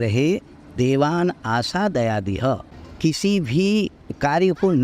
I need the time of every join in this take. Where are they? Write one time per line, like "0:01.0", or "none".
0:02.4